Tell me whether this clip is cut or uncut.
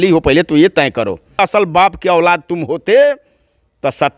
cut